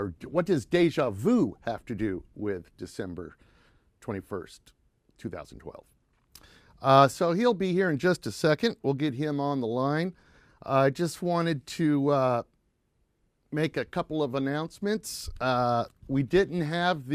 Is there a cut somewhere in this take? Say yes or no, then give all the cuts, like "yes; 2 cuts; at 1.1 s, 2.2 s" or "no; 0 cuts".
no; 0 cuts